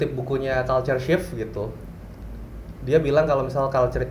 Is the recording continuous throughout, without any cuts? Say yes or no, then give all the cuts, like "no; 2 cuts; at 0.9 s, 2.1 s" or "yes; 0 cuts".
yes; 0 cuts